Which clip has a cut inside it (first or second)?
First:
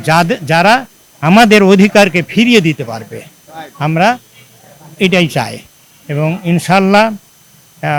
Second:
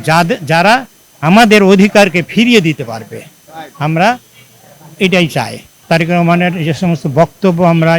second